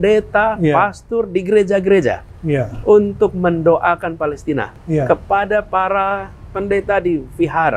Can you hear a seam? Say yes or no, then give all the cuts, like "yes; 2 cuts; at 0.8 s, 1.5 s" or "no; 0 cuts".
no; 0 cuts